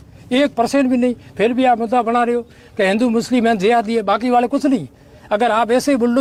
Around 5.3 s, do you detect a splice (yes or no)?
no